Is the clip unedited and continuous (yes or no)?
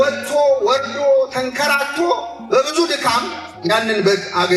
yes